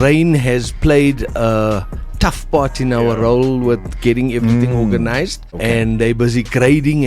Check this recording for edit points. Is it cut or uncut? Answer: cut